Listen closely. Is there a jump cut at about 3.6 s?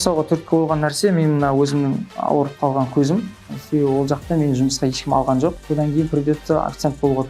yes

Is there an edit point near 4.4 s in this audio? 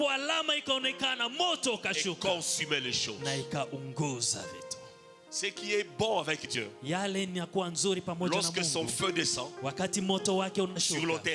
no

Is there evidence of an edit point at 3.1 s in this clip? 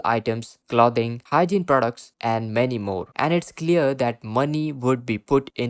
yes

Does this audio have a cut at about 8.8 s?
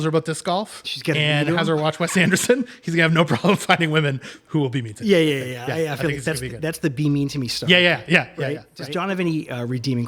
yes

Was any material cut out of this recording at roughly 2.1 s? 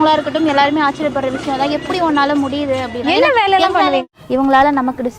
no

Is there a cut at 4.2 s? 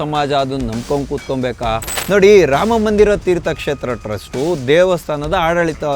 no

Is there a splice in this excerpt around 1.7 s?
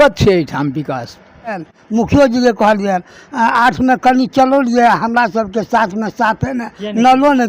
yes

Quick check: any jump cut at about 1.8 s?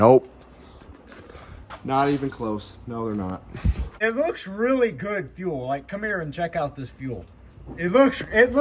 no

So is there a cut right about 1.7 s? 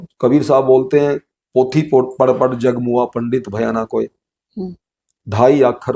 no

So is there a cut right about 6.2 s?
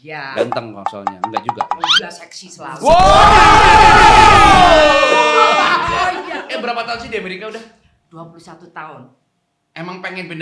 yes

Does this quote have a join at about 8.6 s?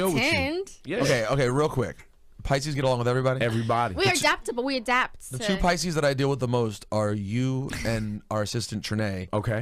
yes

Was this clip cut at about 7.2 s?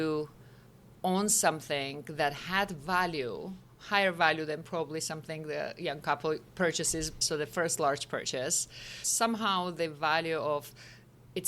yes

